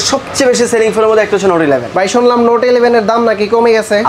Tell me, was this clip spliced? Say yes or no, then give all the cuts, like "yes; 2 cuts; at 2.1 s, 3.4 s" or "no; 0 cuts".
no; 0 cuts